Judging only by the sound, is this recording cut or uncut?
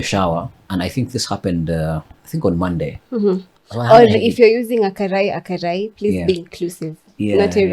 uncut